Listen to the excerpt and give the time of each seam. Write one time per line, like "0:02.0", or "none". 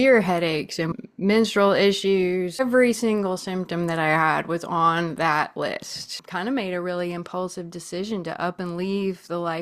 0:00.9
0:02.6
0:06.2